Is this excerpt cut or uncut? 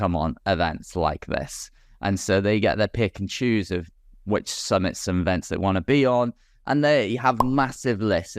uncut